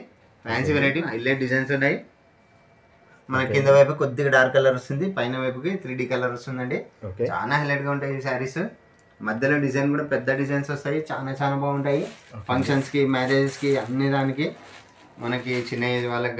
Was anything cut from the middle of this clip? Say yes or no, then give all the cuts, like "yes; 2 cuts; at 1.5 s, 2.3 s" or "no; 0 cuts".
yes; 2 cuts; at 1.0 s, 3.1 s